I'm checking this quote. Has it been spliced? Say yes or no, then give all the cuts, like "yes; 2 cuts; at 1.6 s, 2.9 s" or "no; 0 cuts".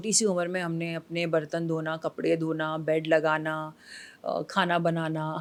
no; 0 cuts